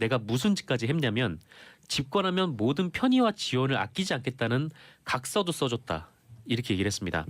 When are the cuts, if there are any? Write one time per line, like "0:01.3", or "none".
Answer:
0:04.6